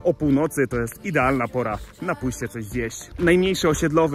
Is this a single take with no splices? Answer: no; 1 cut; at 3.1 s

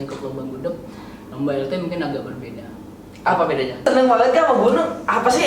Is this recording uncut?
no; 1 cut; at 3.8 s

